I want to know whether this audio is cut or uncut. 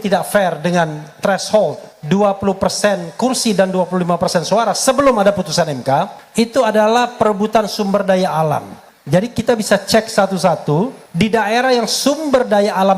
cut